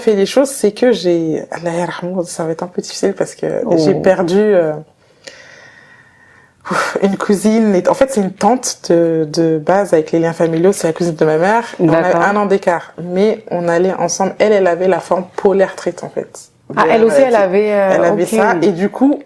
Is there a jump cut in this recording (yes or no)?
no